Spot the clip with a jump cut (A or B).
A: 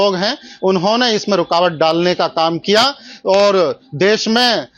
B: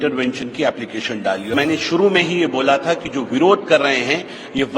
B